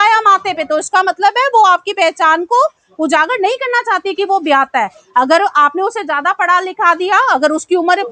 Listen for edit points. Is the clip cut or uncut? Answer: uncut